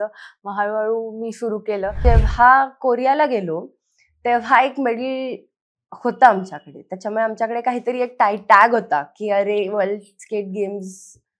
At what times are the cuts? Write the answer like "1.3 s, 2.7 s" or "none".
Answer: 2.0 s

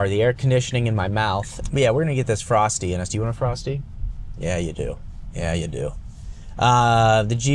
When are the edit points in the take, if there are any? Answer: 1.5 s

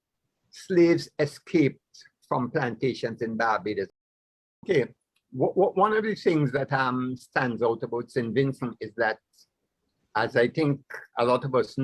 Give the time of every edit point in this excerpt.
3.9 s

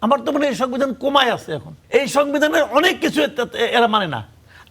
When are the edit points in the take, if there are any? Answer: 1.7 s

